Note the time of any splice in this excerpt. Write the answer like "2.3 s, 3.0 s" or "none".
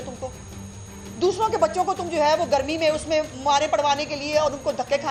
none

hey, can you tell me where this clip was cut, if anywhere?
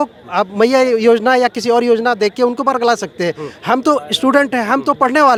none

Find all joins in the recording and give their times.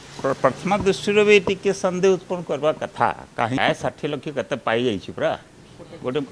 3.6 s

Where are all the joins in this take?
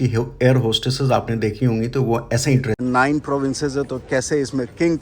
2.8 s

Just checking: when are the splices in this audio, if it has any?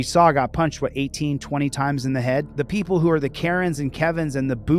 2.5 s

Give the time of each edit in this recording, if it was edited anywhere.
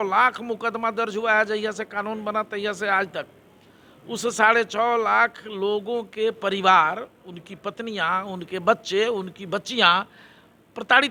none

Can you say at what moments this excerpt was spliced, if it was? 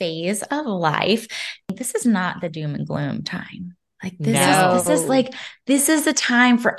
1.7 s

